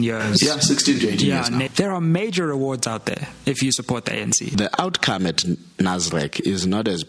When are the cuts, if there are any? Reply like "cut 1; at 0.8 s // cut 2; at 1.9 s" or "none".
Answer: cut 1; at 1.7 s // cut 2; at 4.5 s